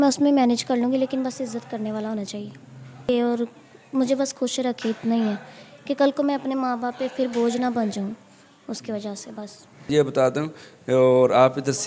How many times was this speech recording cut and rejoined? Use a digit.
2